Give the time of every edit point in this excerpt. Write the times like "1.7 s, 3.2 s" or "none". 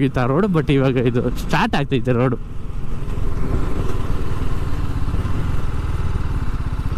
none